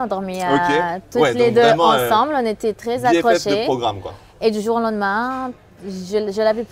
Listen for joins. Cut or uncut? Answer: uncut